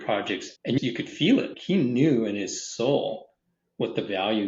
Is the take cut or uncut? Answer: cut